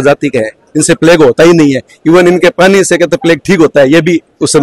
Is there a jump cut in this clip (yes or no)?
no